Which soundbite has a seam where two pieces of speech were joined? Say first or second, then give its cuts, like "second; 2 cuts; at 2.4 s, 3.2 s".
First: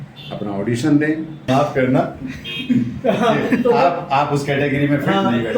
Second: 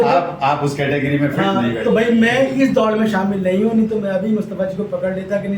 first; 1 cut; at 1.5 s